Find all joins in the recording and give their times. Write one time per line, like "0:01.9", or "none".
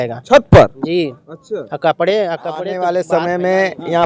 0:02.7